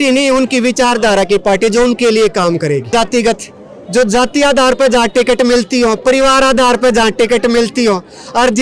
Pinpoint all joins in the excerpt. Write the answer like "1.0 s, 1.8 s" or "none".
2.9 s